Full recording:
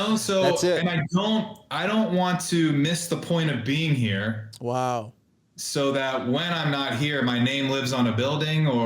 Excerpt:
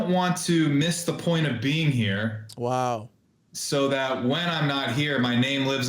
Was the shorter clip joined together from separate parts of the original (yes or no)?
no